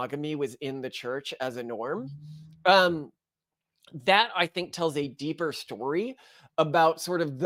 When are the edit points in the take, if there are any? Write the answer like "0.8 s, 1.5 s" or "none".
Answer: none